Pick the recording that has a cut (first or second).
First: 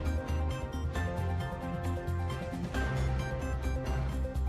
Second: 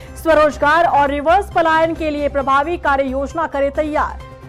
first